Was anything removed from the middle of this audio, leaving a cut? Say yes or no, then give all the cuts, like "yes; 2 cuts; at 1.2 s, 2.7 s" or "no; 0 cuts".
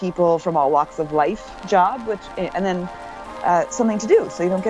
no; 0 cuts